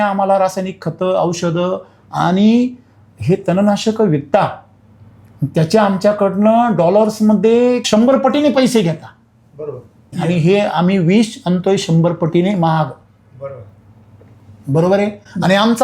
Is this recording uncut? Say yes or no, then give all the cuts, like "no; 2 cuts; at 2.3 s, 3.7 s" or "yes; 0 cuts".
yes; 0 cuts